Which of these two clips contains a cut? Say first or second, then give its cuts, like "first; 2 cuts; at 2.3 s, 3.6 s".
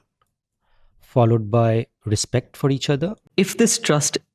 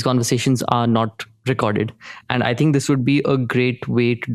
first; 1 cut; at 3.2 s